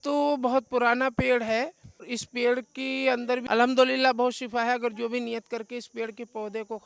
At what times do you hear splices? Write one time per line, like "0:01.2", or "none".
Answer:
0:02.2
0:03.4

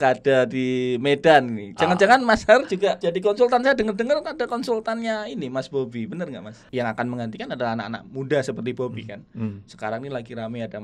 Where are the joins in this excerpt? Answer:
0:03.0
0:06.5

